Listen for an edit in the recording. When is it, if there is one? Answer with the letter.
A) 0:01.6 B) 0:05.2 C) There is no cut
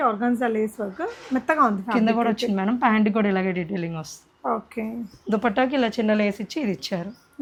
C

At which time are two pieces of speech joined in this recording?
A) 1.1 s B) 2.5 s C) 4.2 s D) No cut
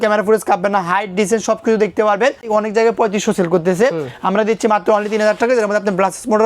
B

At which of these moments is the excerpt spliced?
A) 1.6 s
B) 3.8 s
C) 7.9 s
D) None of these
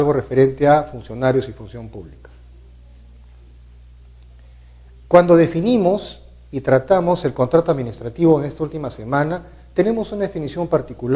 C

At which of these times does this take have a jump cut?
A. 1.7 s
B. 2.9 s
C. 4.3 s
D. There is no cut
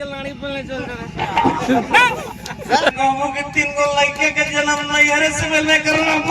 B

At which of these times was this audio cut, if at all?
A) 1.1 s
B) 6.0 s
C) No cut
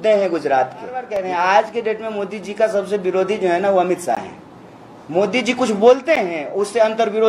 A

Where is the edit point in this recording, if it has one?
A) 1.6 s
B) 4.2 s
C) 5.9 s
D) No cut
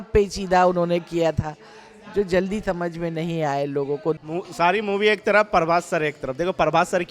B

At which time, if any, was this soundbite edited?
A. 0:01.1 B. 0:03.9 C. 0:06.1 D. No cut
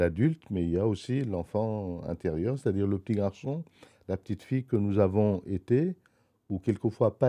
D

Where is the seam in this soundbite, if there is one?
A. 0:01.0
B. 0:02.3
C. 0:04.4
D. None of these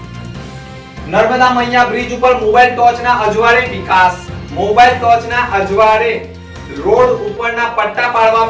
A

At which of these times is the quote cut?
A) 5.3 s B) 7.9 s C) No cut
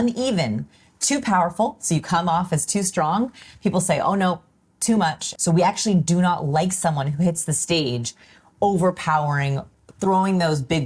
A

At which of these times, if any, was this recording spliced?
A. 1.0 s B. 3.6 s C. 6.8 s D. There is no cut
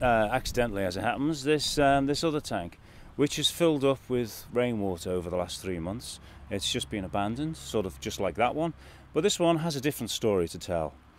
B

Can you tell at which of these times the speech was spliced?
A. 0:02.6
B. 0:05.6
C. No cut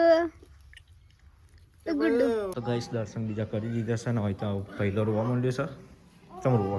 A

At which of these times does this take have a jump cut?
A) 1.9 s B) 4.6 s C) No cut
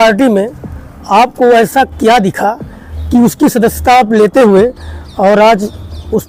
C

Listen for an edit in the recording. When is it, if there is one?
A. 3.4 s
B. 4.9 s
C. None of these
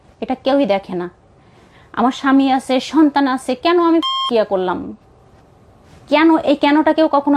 B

